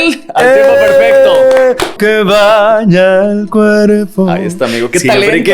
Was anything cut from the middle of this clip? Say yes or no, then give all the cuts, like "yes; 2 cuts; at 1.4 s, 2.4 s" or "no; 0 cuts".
yes; 1 cut; at 2.0 s